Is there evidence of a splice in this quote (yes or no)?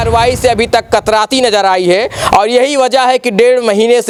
no